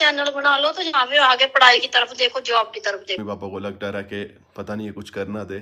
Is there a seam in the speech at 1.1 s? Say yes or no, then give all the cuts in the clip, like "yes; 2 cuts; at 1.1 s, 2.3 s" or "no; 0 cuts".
no; 1 cut; at 3.2 s